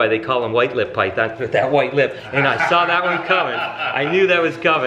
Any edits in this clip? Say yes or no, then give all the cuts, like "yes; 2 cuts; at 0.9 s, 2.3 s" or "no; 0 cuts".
no; 0 cuts